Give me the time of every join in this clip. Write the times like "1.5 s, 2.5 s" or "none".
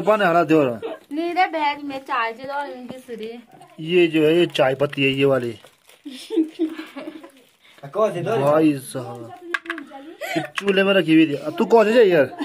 3.7 s